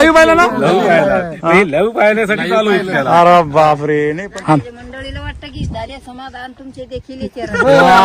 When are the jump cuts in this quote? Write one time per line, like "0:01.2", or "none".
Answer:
0:04.2